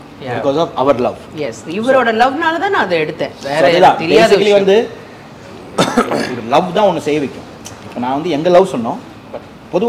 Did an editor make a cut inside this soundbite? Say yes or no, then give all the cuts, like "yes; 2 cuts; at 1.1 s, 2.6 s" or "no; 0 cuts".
no; 0 cuts